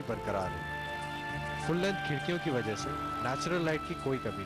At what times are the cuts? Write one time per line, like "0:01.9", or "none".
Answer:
none